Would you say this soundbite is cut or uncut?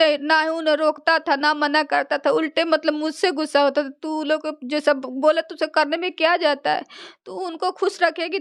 uncut